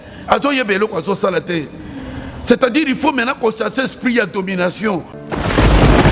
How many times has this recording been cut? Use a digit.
1